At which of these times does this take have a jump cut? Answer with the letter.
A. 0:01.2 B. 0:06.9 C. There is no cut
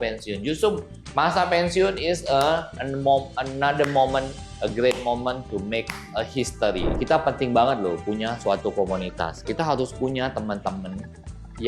B